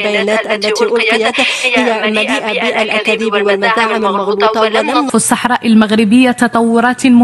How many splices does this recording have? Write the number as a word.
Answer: one